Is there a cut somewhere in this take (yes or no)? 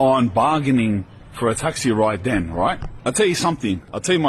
no